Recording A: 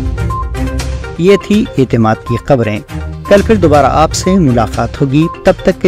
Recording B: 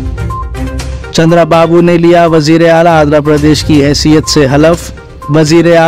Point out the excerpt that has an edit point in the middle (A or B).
B